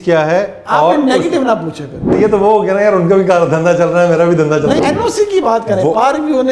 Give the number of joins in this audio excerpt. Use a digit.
2